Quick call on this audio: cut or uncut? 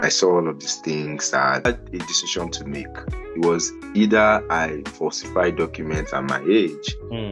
cut